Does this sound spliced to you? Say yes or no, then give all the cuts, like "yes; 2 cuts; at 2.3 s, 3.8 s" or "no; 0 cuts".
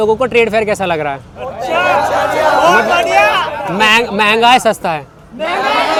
no; 0 cuts